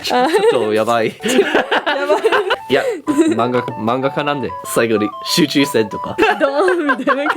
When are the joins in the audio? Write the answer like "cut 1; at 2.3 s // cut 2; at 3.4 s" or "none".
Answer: cut 1; at 2.5 s // cut 2; at 4.6 s // cut 3; at 6.1 s

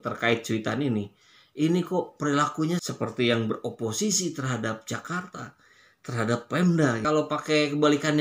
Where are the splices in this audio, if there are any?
cut 1; at 2.9 s

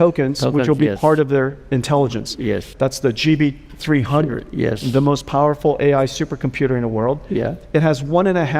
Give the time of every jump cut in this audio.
cut 1; at 2.7 s

